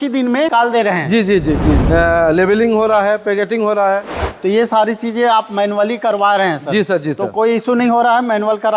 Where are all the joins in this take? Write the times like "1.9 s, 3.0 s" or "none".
1.8 s